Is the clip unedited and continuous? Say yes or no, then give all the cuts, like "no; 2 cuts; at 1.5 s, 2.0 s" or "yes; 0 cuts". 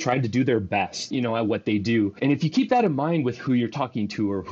no; 2 cuts; at 1.0 s, 2.1 s